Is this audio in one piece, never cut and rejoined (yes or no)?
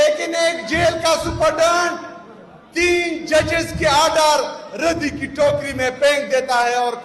yes